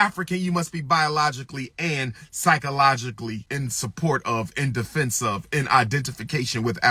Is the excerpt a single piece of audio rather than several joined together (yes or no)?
no